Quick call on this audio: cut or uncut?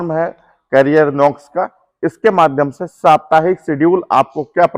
uncut